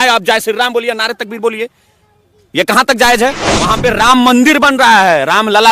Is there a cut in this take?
yes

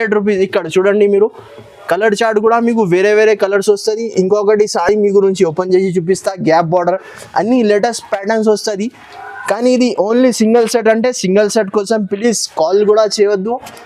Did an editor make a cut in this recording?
no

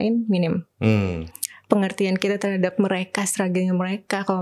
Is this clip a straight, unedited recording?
yes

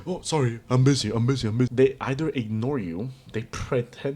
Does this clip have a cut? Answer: yes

